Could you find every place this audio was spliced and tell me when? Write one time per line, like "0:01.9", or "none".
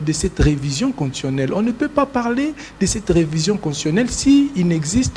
none